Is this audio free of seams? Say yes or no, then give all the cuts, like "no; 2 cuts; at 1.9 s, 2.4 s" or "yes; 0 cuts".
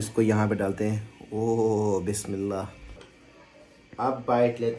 yes; 0 cuts